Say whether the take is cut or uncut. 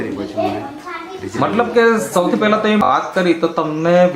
cut